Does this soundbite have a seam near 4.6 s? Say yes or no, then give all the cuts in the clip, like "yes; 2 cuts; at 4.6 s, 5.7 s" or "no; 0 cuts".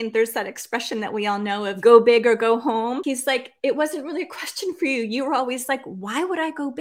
no; 2 cuts; at 1.8 s, 3.0 s